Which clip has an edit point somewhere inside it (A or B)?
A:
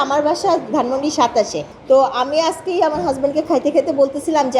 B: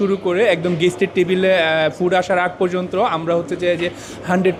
A